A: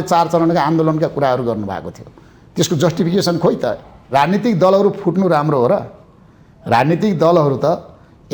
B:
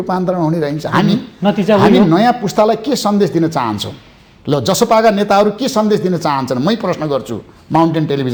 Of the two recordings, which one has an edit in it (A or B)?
A